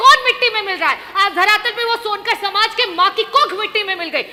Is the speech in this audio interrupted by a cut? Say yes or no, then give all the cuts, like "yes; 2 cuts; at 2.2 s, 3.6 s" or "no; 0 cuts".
no; 0 cuts